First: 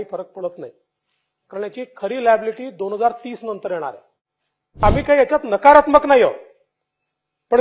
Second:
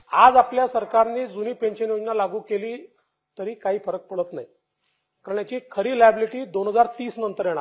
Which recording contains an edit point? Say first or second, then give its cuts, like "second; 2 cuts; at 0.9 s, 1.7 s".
first; 1 cut; at 4.8 s